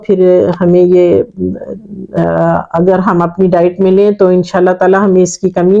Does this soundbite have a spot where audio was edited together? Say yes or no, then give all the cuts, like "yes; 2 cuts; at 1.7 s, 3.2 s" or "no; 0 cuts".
yes; 1 cut; at 2.2 s